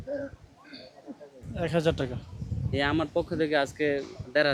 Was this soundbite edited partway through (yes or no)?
no